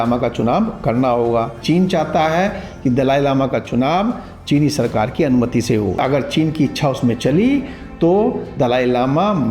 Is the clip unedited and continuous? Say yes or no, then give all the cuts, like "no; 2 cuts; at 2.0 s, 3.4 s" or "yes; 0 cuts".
no; 2 cuts; at 1.6 s, 5.9 s